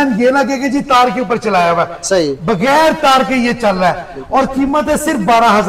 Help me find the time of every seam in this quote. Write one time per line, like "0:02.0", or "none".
none